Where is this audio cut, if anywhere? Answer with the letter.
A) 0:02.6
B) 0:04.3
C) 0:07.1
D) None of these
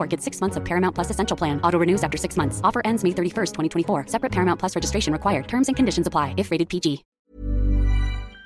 C